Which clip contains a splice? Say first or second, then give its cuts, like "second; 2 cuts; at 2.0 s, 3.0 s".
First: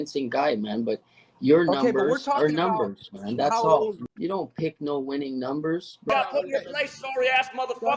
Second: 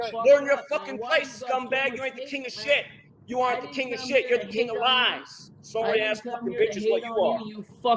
first; 2 cuts; at 4.0 s, 6.1 s